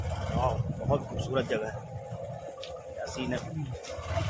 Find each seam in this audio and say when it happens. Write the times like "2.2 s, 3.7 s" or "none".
3.4 s